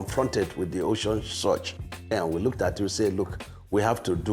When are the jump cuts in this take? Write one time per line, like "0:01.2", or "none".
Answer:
0:02.1